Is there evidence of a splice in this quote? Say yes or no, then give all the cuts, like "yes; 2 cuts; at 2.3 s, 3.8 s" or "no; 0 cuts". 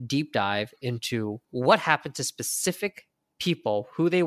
yes; 1 cut; at 1.4 s